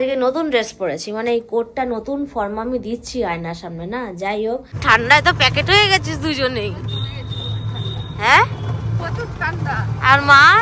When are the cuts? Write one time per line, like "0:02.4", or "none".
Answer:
0:04.7